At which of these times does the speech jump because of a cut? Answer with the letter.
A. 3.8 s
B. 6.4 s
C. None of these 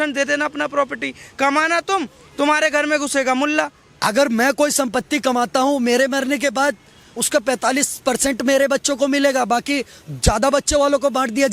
A